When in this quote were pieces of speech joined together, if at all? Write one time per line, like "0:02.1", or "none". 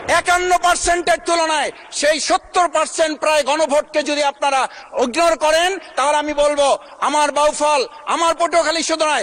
none